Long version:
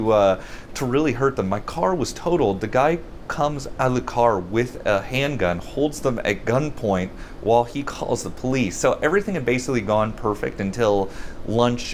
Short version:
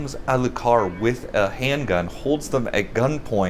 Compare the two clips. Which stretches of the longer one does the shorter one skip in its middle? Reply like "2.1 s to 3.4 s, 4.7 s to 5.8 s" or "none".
none